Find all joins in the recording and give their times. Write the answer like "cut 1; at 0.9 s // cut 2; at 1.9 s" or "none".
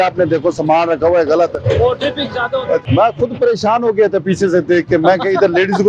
none